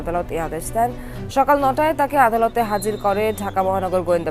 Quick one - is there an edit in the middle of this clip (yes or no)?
yes